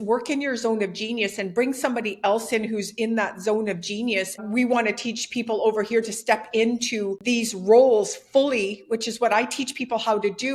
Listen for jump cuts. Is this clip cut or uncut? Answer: uncut